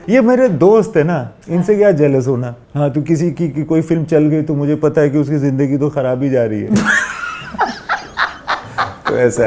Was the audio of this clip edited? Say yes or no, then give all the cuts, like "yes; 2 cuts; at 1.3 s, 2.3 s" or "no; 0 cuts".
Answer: no; 0 cuts